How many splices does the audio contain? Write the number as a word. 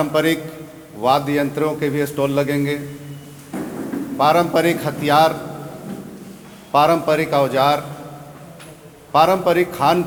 zero